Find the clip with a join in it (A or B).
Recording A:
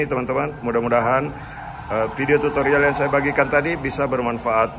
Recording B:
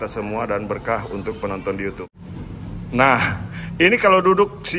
B